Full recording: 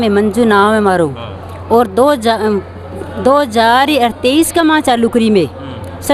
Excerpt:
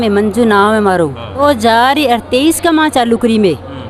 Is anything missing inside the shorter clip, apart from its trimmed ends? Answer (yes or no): yes